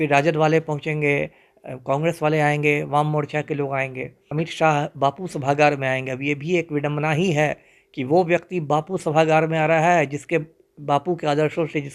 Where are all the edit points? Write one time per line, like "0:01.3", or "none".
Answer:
0:04.3